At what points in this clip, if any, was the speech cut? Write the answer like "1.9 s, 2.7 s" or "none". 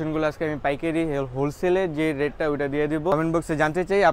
3.1 s